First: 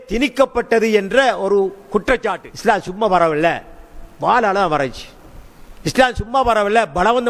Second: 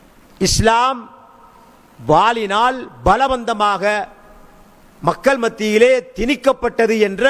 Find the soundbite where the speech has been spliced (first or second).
first